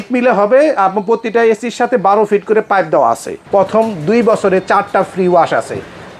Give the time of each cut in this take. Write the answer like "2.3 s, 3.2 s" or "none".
3.3 s